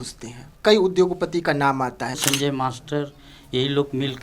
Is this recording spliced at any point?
yes; 1 cut; at 2.2 s

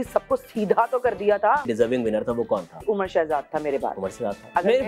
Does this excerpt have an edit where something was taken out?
yes; 2 cuts; at 1.7 s, 2.8 s

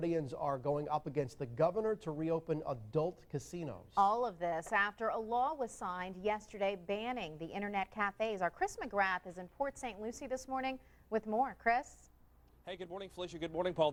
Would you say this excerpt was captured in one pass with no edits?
yes; 0 cuts

